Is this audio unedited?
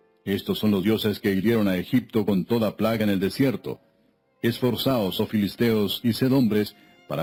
yes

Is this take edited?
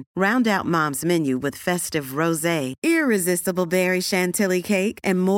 no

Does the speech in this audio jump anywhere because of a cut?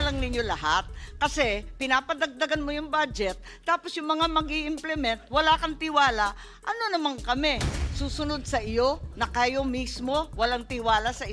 no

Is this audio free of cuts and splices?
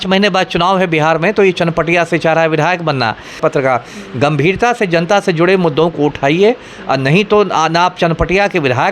no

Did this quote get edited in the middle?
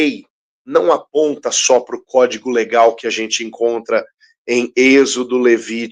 no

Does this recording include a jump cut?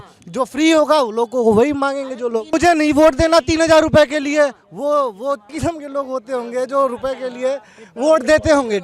no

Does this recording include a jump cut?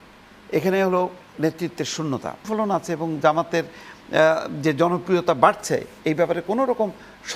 yes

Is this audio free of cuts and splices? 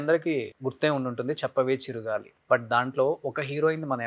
no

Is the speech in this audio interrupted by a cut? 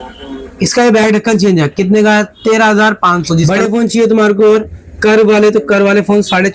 yes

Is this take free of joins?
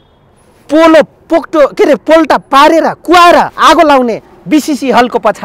yes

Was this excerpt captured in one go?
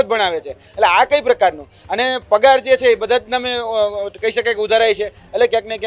yes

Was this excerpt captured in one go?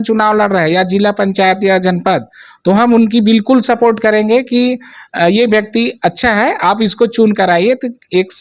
yes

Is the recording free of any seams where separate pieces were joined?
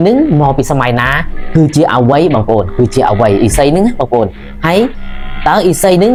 yes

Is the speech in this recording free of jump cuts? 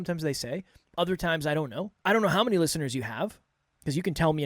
no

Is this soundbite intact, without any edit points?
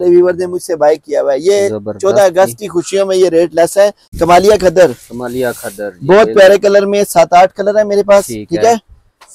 no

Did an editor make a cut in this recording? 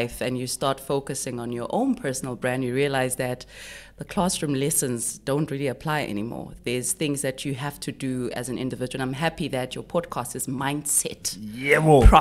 no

